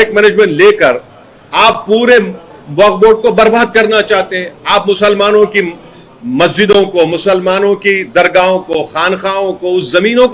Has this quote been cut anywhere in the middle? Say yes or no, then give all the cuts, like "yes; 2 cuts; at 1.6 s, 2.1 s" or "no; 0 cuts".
no; 0 cuts